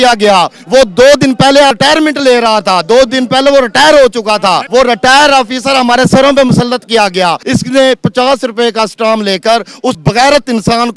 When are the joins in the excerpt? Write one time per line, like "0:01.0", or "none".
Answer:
0:01.7
0:04.6
0:07.4
0:10.0